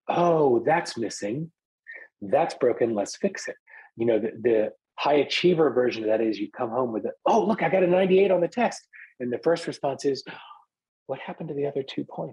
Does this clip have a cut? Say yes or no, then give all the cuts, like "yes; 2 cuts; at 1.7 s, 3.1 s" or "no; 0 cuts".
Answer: yes; 1 cut; at 1.7 s